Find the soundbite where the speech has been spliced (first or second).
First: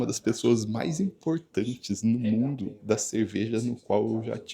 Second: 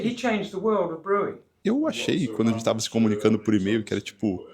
second